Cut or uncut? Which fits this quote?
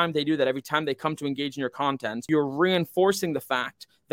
cut